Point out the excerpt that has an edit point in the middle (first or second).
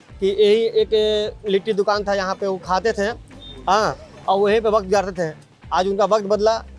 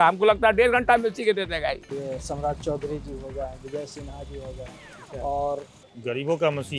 second